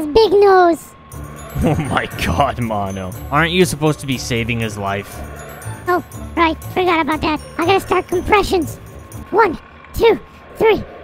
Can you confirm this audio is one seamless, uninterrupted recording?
no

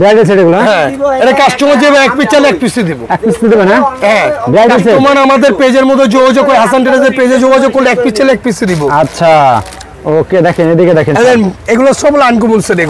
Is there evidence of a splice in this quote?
no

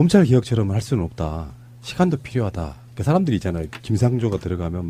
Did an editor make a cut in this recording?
no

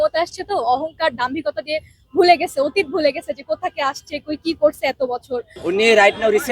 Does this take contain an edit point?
yes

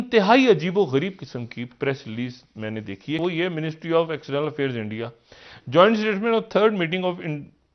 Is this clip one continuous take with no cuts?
no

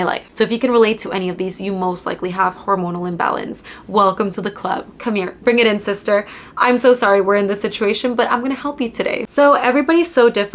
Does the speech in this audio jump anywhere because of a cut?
no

